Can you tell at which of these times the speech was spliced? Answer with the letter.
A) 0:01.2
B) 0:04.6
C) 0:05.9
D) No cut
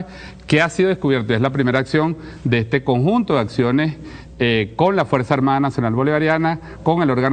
C